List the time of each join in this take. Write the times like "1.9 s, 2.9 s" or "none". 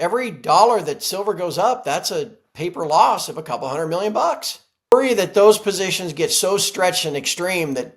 4.8 s